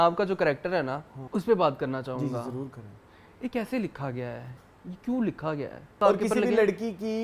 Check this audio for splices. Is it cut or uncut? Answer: cut